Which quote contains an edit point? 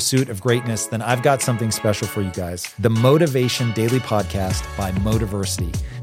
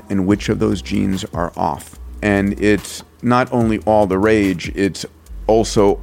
second; 1 cut; at 2.1 s

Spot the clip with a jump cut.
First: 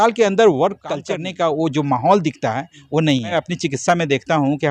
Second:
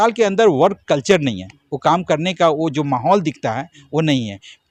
first; 2 cuts; at 1.0 s, 3.3 s

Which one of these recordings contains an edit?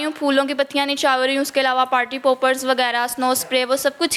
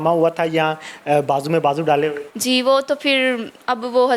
second; 1 cut; at 2.3 s

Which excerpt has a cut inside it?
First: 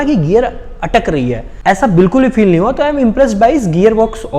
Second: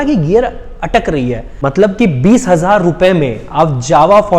second; 1 cut; at 1.4 s

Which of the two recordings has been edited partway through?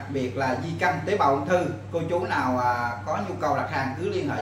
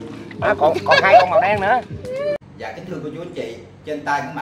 second; 1 cut; at 2.5 s

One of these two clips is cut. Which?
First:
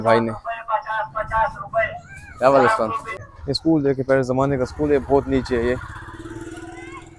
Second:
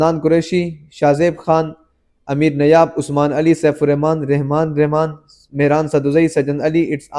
first; 1 cut; at 3.1 s

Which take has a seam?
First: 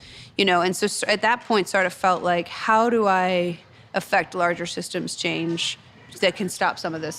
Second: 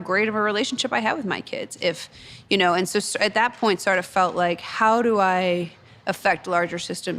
first; 1 cut; at 6.0 s

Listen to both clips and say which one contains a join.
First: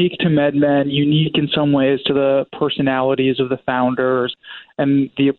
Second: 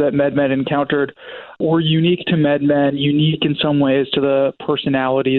first; 1 cut; at 4.3 s

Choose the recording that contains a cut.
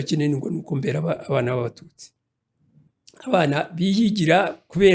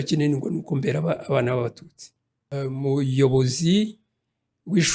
second; 1 cut; at 2.6 s

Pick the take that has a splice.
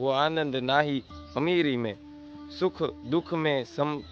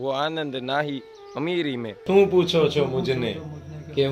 second; 1 cut; at 2.0 s

